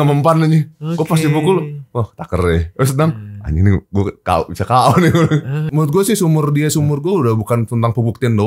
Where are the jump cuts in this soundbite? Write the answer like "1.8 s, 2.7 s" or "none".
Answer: 5.7 s